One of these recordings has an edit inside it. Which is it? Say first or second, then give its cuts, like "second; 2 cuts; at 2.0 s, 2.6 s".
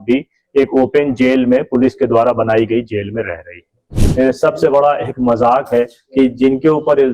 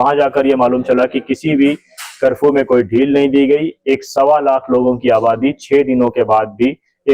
first; 1 cut; at 4.0 s